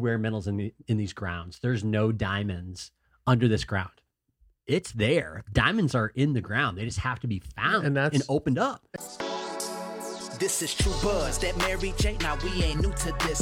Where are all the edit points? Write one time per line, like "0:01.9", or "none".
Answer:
0:08.8